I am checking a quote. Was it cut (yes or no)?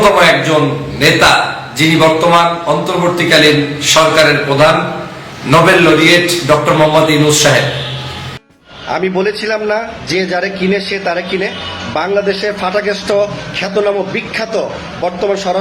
yes